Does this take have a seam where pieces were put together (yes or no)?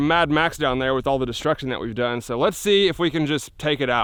no